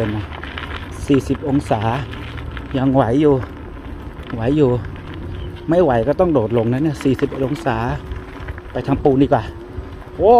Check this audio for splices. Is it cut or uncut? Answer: uncut